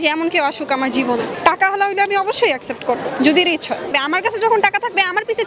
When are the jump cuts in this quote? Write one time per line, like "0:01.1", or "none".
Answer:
0:01.3
0:03.9

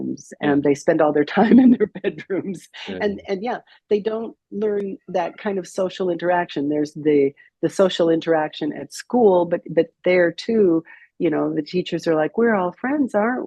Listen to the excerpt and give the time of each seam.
none

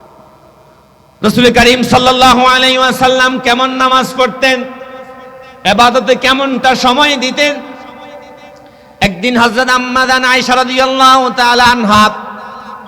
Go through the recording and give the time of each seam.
none

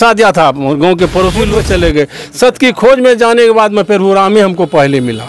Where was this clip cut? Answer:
0:01.6

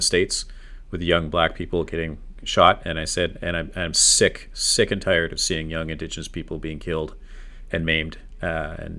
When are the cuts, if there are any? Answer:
none

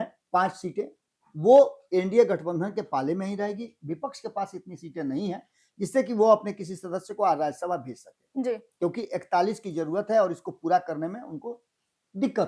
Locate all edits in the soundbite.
none

